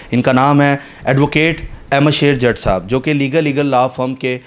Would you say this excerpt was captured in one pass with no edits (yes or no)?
yes